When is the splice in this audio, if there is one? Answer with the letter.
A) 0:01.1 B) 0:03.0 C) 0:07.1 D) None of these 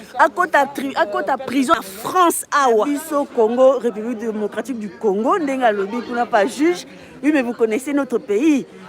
B